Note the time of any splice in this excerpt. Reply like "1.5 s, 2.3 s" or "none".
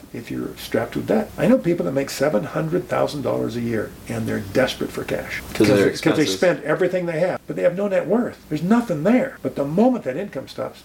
1.3 s, 5.4 s, 7.5 s, 8.4 s, 9.4 s